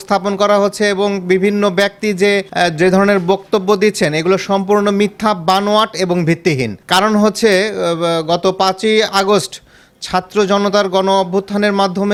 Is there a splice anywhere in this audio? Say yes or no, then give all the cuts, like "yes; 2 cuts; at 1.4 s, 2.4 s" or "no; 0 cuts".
no; 0 cuts